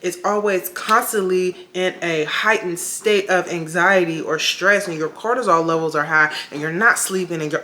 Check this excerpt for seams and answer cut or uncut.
uncut